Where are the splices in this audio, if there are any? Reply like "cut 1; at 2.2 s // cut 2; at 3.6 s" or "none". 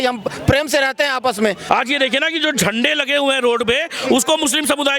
cut 1; at 1.6 s